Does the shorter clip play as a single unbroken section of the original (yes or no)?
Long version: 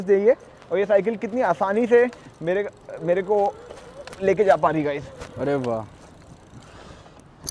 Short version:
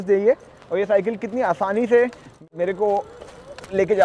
no